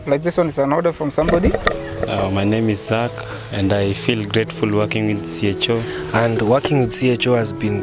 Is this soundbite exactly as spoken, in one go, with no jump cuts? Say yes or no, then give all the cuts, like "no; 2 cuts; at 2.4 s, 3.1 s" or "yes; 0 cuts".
no; 2 cuts; at 1.5 s, 6.0 s